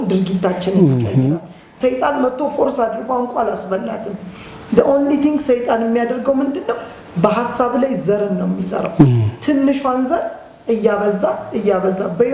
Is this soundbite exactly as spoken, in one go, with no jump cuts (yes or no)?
no